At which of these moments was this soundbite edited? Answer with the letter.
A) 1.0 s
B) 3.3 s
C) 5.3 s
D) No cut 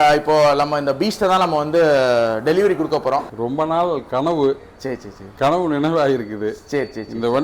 B